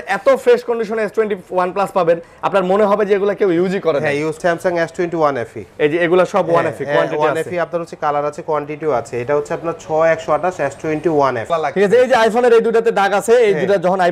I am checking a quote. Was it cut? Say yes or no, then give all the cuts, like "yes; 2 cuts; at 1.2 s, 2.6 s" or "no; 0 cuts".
yes; 2 cuts; at 4.4 s, 11.5 s